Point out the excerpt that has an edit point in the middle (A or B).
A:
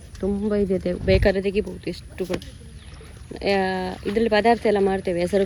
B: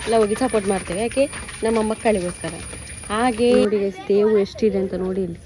B